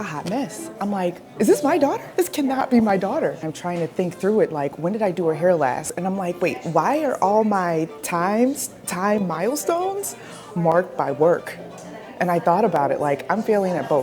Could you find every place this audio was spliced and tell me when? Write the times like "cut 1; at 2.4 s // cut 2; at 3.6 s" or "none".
cut 1; at 1.2 s // cut 2; at 3.5 s // cut 3; at 5.9 s